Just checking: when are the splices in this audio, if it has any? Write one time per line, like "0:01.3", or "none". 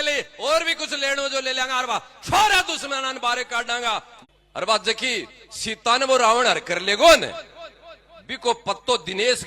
0:04.1